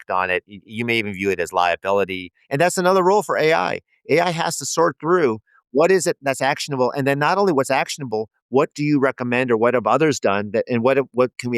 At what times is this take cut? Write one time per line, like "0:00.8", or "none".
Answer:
0:02.3

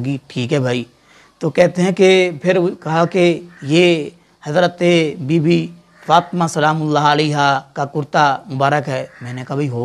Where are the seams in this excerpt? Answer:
0:03.5

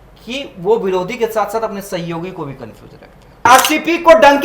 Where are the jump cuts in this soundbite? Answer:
0:03.5

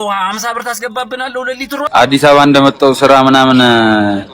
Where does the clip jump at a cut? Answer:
0:01.8

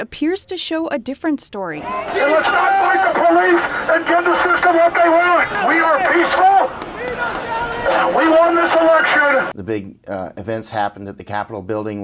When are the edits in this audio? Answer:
0:02.1
0:05.5
0:09.5

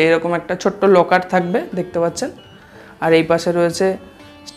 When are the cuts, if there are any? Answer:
none

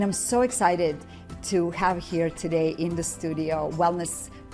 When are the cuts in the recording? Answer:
none

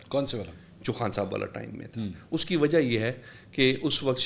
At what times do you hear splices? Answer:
none

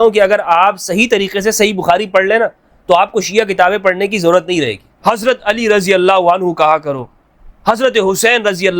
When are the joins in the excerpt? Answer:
0:04.8

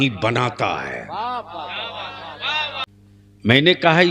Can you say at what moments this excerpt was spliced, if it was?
0:02.8

